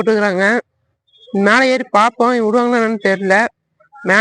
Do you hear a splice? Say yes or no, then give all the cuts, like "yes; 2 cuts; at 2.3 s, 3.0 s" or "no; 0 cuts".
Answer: no; 0 cuts